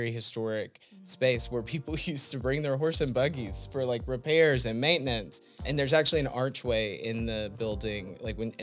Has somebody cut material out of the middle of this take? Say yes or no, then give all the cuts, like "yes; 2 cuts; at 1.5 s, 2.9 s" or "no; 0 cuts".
yes; 1 cut; at 5.6 s